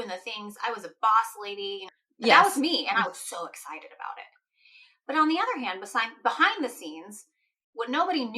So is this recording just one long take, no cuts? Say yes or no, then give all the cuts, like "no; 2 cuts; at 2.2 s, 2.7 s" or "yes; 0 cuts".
no; 1 cut; at 1.8 s